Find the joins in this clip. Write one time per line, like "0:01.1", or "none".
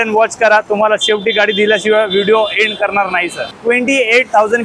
0:03.4